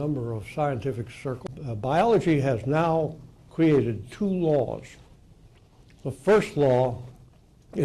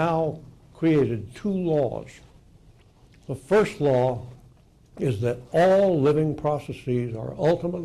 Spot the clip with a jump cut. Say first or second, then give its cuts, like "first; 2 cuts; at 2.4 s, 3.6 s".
first; 1 cut; at 1.3 s